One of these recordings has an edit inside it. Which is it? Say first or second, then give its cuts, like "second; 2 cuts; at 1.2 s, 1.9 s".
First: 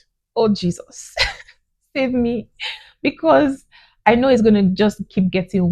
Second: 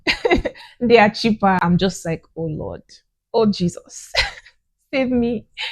second; 1 cut; at 1.6 s